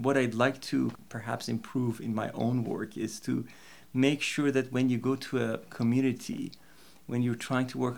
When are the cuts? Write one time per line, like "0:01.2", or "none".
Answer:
none